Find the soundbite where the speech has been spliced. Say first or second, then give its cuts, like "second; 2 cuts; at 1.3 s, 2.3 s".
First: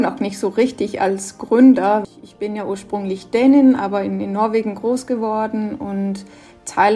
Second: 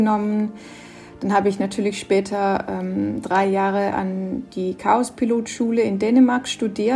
first; 1 cut; at 2.0 s